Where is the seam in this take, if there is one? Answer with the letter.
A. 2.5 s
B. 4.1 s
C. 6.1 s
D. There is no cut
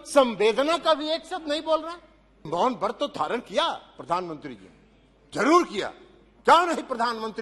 A